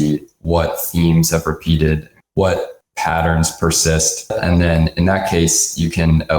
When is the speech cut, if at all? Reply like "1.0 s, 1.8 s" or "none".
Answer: 4.3 s